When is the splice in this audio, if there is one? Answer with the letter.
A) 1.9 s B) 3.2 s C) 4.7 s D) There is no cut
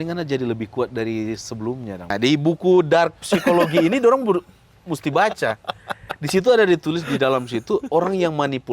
A